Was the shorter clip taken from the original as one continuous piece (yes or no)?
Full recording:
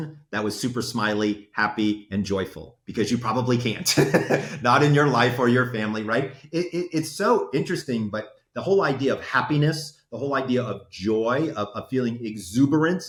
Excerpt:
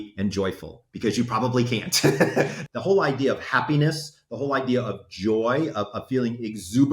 no